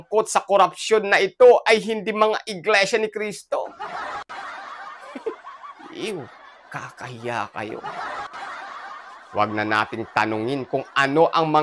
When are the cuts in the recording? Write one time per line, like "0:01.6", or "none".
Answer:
0:07.8
0:09.2